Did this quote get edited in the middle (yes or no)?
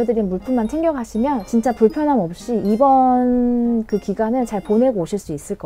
no